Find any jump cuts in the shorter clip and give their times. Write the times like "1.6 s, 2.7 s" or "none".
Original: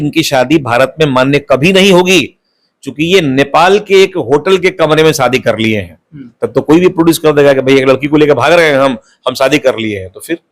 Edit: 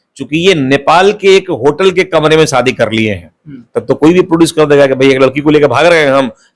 none